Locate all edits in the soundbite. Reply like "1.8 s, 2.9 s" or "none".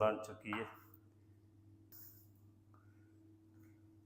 1.9 s